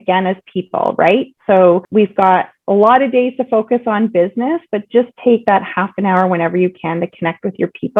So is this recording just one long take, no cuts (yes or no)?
yes